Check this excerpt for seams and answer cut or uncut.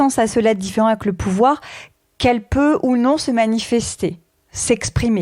uncut